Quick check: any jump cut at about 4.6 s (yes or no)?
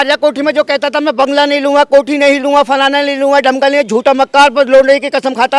no